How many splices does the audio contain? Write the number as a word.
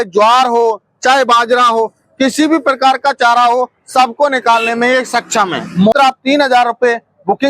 one